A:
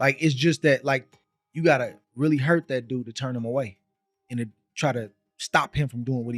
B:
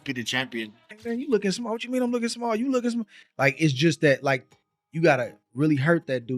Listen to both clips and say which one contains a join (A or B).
B